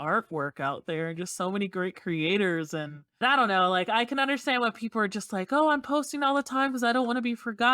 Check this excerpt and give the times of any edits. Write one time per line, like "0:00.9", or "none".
0:03.0